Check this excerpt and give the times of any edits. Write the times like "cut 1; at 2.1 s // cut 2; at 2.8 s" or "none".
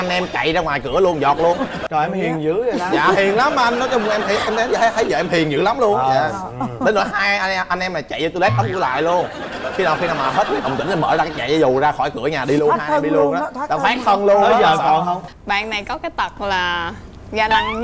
cut 1; at 1.8 s // cut 2; at 15.3 s